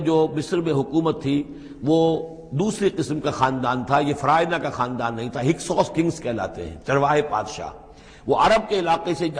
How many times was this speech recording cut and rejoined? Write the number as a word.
zero